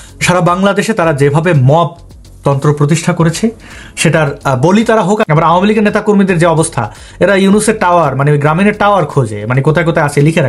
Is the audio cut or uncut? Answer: cut